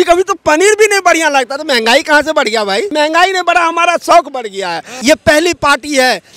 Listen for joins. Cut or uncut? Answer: cut